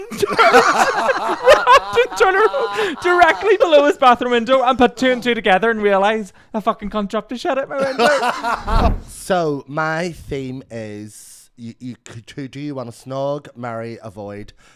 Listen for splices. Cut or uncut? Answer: cut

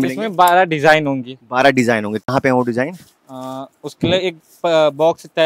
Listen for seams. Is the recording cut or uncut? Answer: uncut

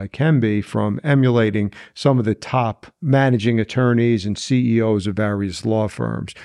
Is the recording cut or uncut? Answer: cut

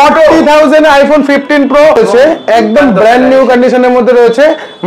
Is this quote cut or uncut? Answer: cut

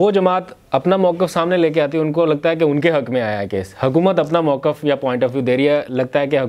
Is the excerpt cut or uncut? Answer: uncut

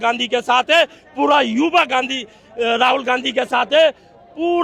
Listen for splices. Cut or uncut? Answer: uncut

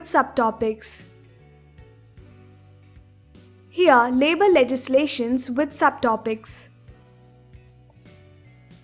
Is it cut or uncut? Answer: cut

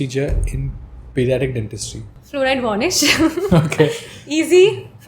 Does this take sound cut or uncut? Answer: cut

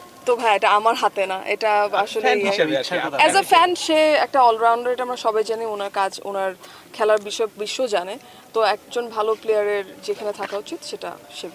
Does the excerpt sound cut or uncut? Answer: uncut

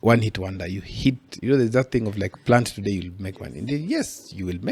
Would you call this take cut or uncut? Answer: uncut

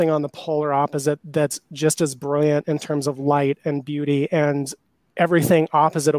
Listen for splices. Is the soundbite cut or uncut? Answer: uncut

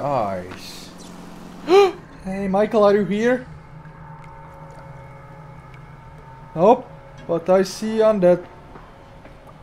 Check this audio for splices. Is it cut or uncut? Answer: cut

